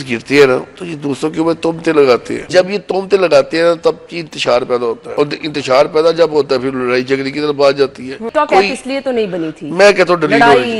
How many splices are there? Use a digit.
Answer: 3